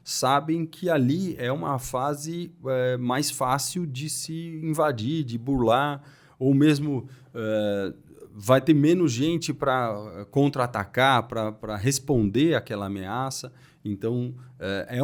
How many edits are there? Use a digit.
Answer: 0